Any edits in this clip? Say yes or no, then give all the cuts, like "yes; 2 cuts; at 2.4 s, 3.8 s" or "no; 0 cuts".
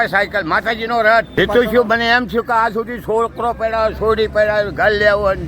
yes; 1 cut; at 1.4 s